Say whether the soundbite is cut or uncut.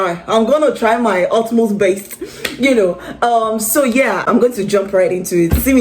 cut